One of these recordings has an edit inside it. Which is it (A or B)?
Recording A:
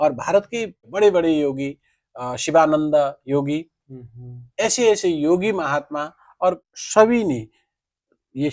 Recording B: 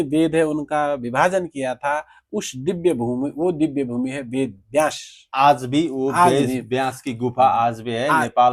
A